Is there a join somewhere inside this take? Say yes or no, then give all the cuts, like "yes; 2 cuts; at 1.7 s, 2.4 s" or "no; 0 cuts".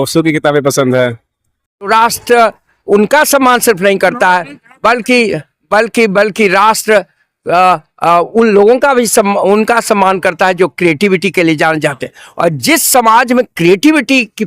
yes; 1 cut; at 1.9 s